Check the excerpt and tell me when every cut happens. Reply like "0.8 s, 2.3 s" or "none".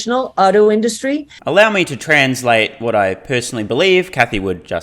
none